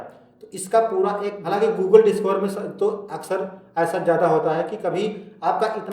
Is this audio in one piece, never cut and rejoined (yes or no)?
no